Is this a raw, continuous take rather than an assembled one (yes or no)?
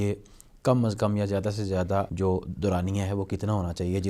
no